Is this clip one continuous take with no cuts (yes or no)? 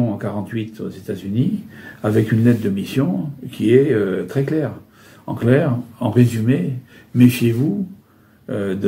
yes